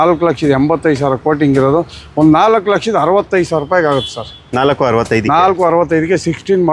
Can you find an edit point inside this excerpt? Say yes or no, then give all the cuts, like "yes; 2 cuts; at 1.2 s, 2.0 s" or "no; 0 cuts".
no; 0 cuts